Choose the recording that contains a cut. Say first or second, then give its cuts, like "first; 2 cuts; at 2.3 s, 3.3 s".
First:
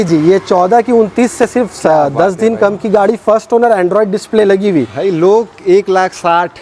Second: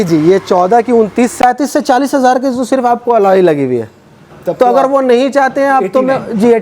second; 1 cut; at 1.4 s